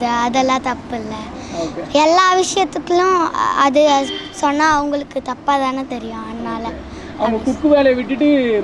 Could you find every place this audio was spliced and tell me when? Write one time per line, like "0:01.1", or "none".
none